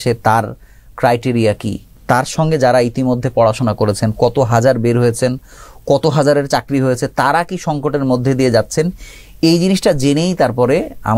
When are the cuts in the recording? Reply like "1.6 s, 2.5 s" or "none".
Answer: 1.9 s